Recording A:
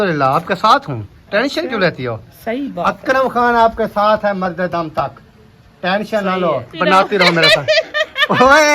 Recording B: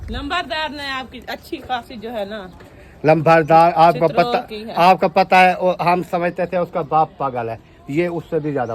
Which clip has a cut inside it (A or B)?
A